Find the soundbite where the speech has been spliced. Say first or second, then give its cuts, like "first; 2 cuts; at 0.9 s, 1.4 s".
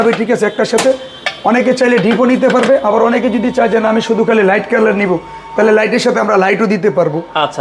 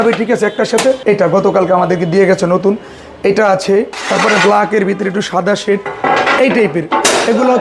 second; 2 cuts; at 1.0 s, 4.0 s